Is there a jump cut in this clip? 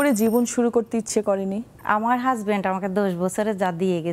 yes; 1 cut; at 1.7 s

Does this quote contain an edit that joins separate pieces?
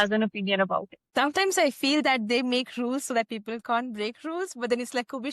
yes; 1 cut; at 1.0 s

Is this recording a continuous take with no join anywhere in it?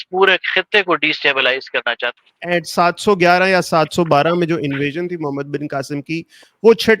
no; 1 cut; at 2.1 s

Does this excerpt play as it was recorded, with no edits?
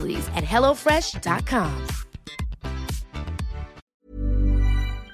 no; 1 cut; at 3.8 s

